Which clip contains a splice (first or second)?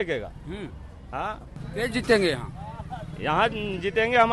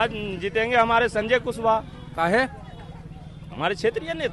first